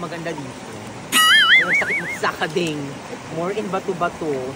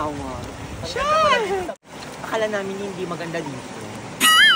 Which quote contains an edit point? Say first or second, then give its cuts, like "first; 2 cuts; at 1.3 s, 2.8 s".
second; 1 cut; at 1.9 s